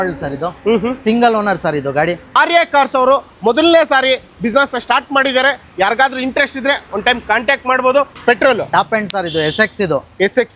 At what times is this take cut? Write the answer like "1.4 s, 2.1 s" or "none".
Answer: 2.4 s, 8.1 s